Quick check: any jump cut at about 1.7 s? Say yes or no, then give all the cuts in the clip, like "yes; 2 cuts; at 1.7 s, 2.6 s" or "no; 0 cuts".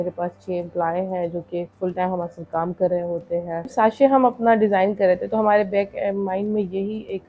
yes; 2 cuts; at 1.7 s, 3.7 s